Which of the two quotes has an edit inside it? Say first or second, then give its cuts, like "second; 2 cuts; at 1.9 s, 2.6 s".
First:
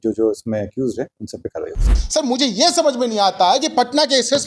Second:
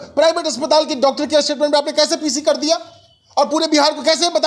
first; 1 cut; at 1.9 s